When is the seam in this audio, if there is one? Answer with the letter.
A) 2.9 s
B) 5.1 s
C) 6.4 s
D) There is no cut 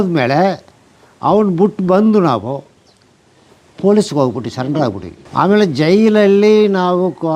B